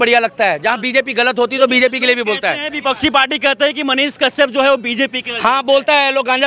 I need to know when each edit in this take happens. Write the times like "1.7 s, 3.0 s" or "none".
none